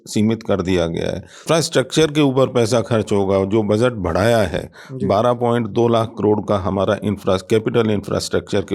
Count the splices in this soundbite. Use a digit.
1